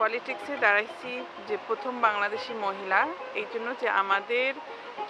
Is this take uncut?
yes; 0 cuts

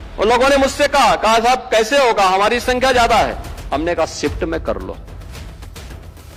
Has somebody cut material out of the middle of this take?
no; 0 cuts

